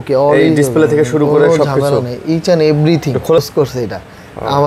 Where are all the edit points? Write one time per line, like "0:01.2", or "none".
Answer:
0:03.4